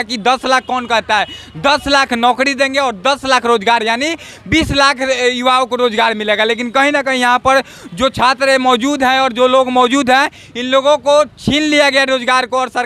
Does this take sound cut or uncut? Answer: uncut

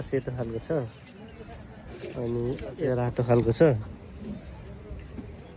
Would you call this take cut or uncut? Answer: cut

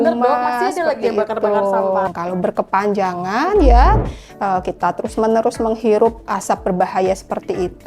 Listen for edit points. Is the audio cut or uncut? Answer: cut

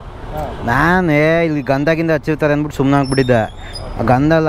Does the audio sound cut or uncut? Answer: uncut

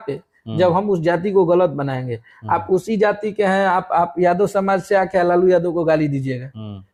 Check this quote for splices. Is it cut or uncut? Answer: uncut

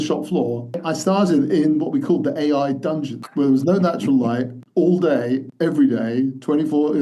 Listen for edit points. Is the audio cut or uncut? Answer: cut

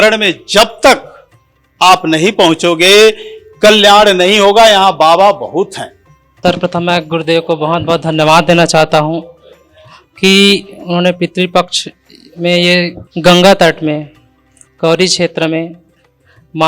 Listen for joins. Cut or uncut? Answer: cut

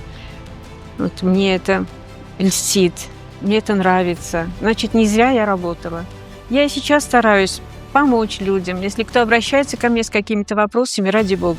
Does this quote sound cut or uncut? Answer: uncut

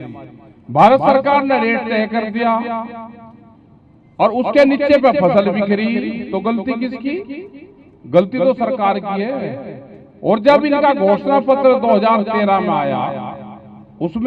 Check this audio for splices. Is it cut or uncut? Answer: uncut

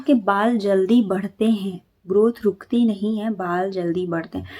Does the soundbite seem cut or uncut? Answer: uncut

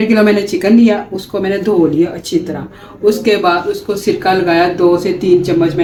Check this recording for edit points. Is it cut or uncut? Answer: uncut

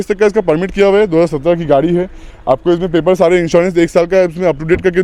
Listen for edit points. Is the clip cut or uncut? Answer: uncut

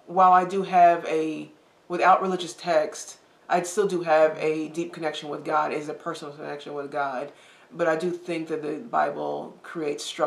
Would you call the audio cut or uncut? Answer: uncut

